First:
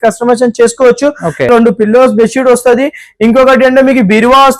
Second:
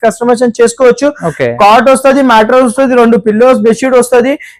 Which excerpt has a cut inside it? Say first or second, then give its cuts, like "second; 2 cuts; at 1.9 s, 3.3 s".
first; 1 cut; at 1.5 s